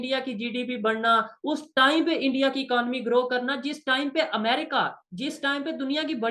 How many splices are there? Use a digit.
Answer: 0